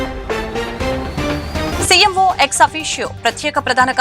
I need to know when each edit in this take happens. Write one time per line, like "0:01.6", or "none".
0:01.7